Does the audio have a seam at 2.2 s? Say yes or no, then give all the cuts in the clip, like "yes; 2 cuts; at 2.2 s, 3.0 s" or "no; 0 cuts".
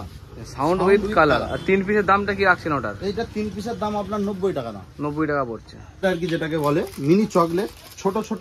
no; 1 cut; at 6.0 s